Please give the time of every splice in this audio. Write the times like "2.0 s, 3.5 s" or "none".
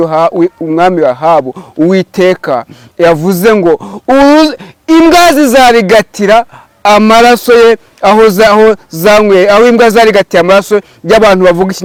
none